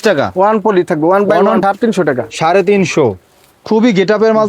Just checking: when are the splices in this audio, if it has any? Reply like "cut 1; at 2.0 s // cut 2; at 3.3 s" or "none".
cut 1; at 1.6 s